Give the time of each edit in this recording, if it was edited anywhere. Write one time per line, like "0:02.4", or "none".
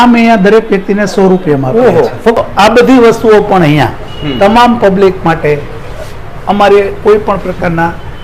0:02.4